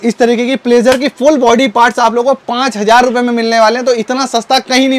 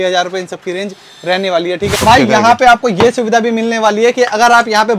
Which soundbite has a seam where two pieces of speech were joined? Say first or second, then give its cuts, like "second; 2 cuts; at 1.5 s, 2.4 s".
second; 1 cut; at 2.0 s